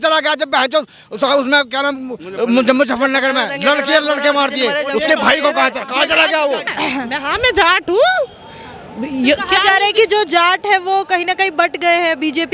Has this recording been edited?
yes; 1 cut; at 6.7 s

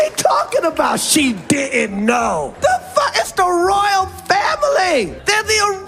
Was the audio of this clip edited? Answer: no; 0 cuts

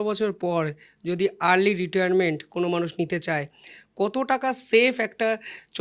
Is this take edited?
no; 0 cuts

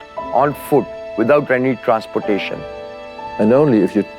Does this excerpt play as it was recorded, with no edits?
no; 1 cut; at 3.1 s

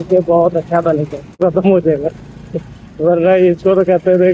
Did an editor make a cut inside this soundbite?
yes; 1 cut; at 1.4 s

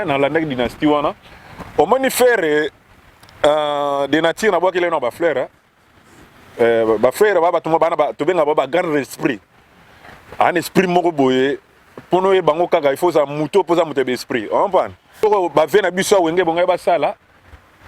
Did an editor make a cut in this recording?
yes; 1 cut; at 15.2 s

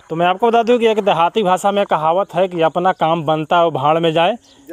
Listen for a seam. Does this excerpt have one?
no; 0 cuts

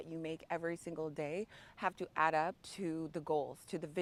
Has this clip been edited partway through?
no; 0 cuts

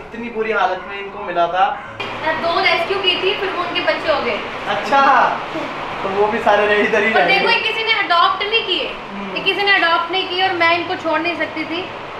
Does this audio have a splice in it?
yes; 1 cut; at 2.0 s

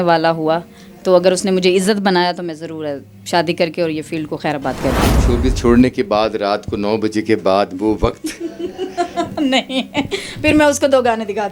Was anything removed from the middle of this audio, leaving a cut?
no; 0 cuts

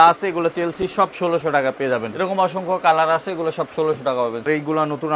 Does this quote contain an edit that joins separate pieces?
yes; 2 cuts; at 2.1 s, 4.4 s

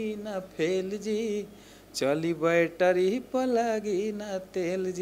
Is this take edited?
no; 0 cuts

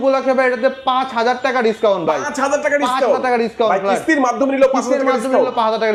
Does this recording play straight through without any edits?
yes; 0 cuts

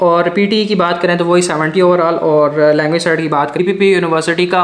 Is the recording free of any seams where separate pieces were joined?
no; 1 cut; at 3.6 s

